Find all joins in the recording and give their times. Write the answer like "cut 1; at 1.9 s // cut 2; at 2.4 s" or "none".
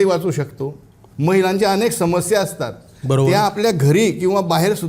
cut 1; at 1.0 s